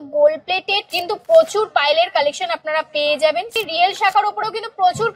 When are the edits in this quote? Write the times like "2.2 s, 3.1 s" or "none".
0.9 s, 3.6 s